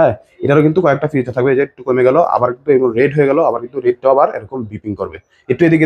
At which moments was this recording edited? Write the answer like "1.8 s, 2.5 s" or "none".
none